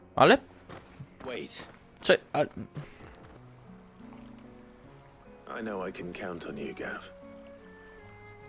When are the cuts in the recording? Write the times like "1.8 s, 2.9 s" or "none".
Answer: 3.4 s